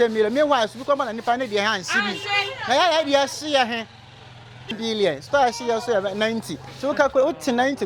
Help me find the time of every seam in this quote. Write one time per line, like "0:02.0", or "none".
0:04.7